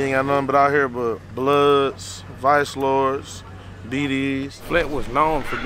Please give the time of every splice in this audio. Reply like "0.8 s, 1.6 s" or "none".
1.3 s, 4.6 s